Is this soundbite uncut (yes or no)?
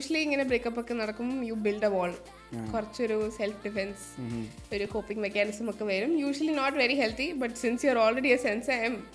yes